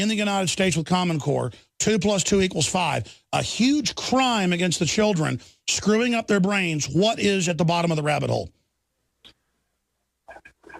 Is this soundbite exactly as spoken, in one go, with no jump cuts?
yes; 0 cuts

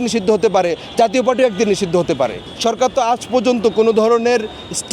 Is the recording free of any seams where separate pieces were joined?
no; 1 cut; at 2.5 s

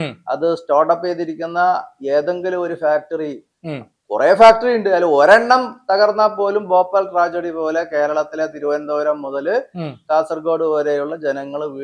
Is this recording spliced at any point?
no; 0 cuts

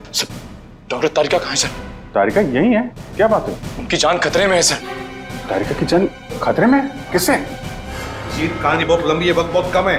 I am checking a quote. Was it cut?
no; 0 cuts

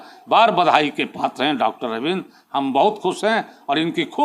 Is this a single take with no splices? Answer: yes; 0 cuts

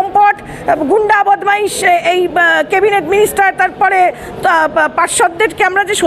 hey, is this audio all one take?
yes; 0 cuts

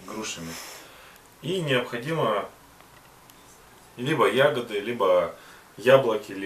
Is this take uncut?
no; 1 cut; at 4.3 s

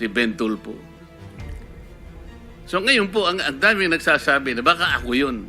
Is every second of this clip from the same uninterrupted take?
no; 2 cuts; at 1.0 s, 2.7 s

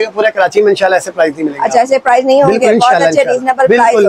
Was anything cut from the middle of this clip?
no; 0 cuts

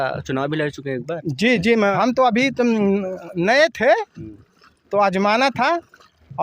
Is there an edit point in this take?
yes; 1 cut; at 1.9 s

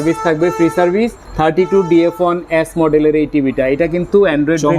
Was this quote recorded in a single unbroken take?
yes; 0 cuts

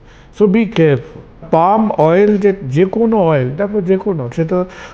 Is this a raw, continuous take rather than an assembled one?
no; 1 cut; at 1.4 s

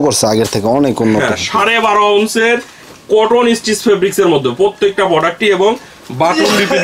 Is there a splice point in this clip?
no; 0 cuts

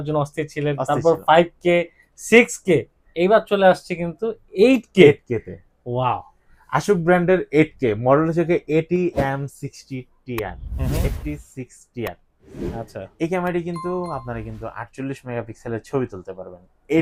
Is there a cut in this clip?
no; 0 cuts

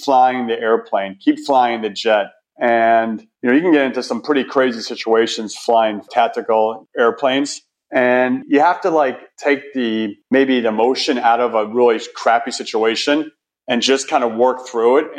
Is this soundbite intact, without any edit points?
yes; 0 cuts

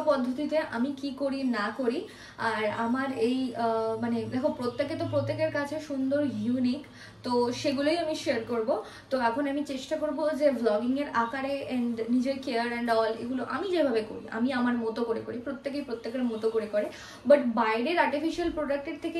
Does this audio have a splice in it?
no; 0 cuts

